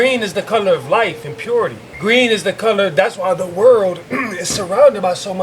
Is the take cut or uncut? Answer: cut